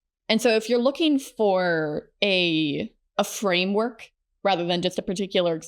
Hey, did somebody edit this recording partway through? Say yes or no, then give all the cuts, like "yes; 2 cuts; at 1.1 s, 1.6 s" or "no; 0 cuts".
yes; 1 cut; at 3.0 s